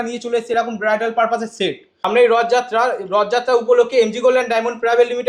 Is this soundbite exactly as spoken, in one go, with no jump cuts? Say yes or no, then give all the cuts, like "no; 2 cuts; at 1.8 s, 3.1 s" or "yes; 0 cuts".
no; 1 cut; at 1.9 s